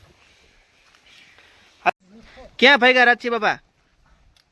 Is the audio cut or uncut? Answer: cut